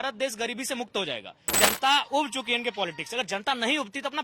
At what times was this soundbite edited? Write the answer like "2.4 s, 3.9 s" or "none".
1.6 s